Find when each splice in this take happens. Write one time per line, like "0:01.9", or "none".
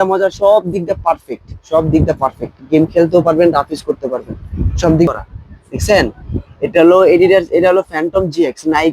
0:05.1